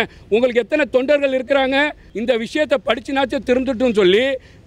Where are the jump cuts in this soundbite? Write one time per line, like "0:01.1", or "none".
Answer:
0:02.0